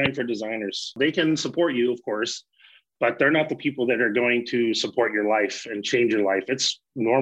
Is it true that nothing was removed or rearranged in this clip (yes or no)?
no